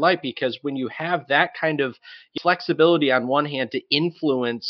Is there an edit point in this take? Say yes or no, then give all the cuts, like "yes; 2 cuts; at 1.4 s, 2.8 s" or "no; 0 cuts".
no; 0 cuts